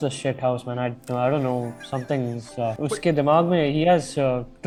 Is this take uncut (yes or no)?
yes